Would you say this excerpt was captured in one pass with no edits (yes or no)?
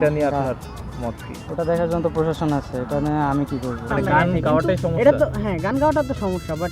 no